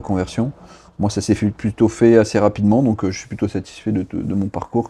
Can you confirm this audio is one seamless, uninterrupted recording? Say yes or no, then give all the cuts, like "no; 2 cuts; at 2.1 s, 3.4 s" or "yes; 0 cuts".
yes; 0 cuts